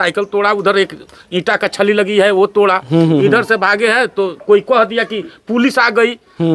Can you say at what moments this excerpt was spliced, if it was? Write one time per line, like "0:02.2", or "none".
none